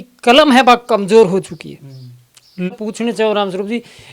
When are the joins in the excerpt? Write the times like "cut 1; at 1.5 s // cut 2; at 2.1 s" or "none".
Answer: cut 1; at 2.7 s